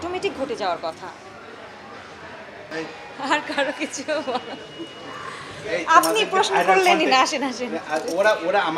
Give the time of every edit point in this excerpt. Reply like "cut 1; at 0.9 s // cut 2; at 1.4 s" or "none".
cut 1; at 2.7 s

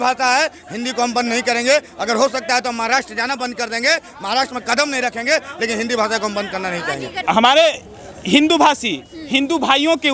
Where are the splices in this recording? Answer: cut 1; at 7.3 s

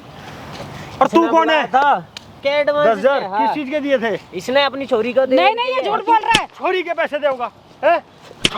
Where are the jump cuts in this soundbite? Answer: cut 1; at 2.4 s

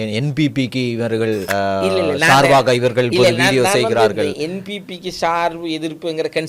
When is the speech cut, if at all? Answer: cut 1; at 1.4 s

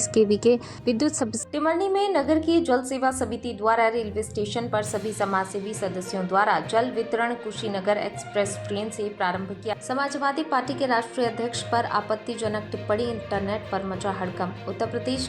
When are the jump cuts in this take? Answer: cut 1; at 1.4 s // cut 2; at 9.7 s

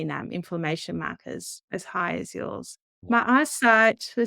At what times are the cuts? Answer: cut 1; at 1.5 s // cut 2; at 3.0 s

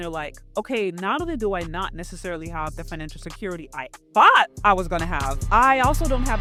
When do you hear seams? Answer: none

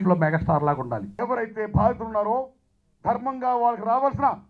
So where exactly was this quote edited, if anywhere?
cut 1; at 1.1 s

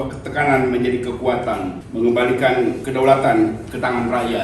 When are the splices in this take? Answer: cut 1; at 1.8 s // cut 2; at 2.8 s

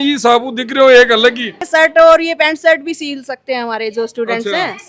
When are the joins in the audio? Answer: cut 1; at 1.5 s

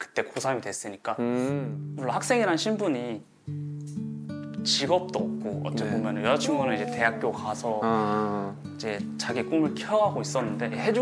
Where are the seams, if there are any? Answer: cut 1; at 1.8 s

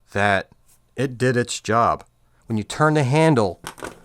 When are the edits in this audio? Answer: cut 1; at 2.4 s

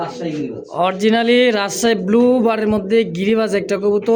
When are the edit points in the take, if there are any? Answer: none

